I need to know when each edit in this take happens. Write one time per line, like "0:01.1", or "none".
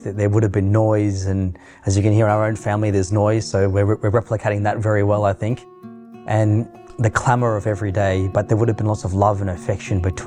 none